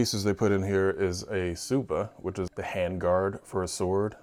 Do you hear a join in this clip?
no; 0 cuts

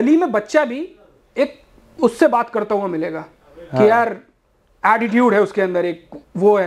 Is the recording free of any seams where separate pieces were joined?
yes; 0 cuts

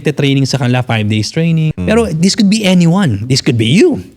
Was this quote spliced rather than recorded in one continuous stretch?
yes; 1 cut; at 1.7 s

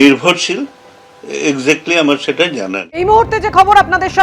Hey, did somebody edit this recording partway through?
yes; 1 cut; at 2.8 s

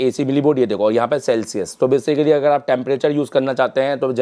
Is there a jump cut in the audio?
no; 0 cuts

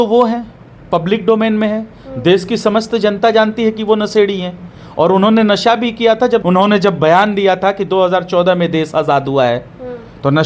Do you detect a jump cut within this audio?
yes; 1 cut; at 6.4 s

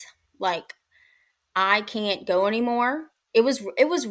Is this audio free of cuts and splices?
no; 1 cut; at 3.2 s

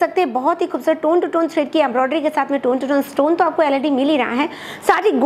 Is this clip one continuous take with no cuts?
yes; 0 cuts

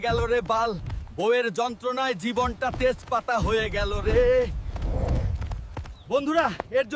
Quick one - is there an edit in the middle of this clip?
yes; 1 cut; at 6.0 s

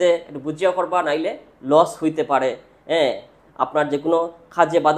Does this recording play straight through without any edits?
yes; 0 cuts

